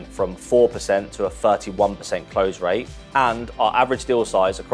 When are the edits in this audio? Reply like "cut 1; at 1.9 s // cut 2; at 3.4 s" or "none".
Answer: none